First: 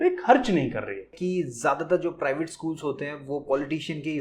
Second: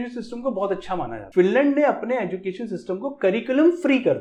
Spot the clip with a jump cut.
first; 1 cut; at 1.2 s

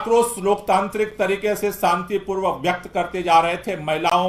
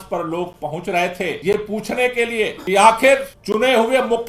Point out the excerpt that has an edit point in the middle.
second; 3 cuts; at 1.4 s, 2.6 s, 3.4 s

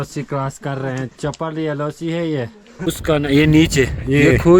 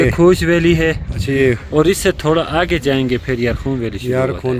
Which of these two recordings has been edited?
first; 1 cut; at 2.9 s

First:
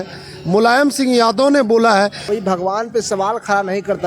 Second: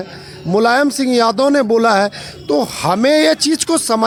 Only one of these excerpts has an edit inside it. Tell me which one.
first; 1 cut; at 2.2 s

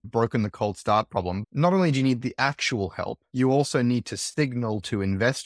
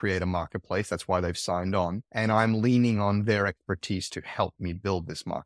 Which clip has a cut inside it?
first; 2 cuts; at 1.4 s, 4.2 s

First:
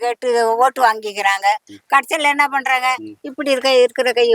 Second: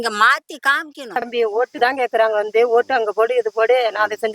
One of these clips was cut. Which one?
second; 1 cut; at 1.3 s

